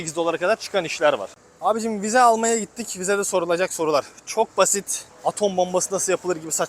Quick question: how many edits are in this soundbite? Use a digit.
1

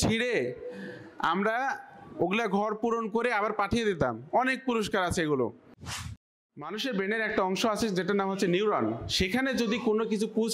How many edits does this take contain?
1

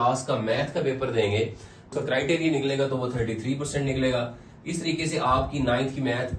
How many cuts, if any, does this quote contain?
1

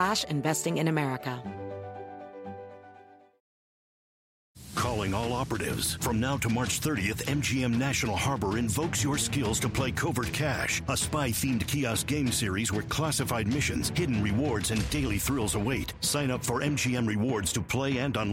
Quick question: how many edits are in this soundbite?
1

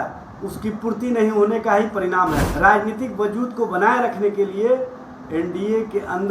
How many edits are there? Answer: 1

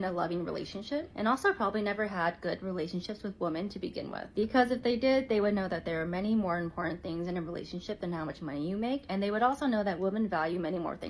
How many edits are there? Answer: 1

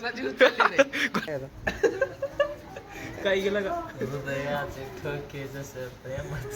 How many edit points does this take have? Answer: 1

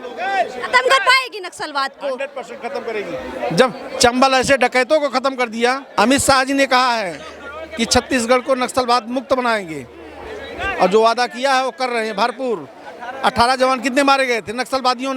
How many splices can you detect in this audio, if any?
1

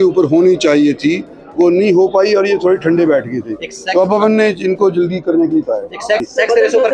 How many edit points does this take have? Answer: 0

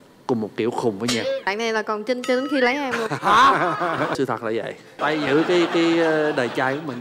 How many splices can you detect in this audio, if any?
3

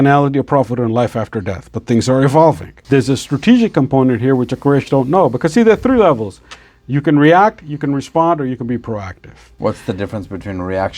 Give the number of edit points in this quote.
2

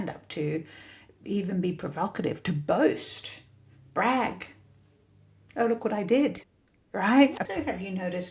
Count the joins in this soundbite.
1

